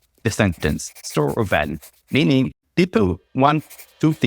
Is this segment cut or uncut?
cut